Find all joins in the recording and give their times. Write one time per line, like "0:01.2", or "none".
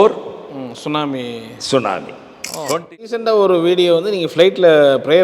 0:03.2